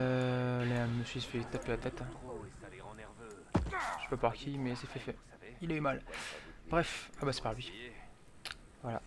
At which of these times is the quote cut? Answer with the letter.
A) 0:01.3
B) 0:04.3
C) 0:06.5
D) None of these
B